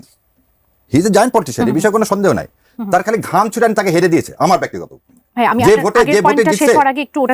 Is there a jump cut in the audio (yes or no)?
no